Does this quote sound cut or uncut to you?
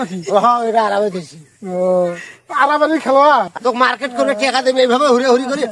cut